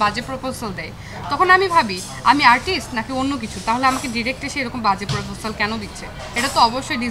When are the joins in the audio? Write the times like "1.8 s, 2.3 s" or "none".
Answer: none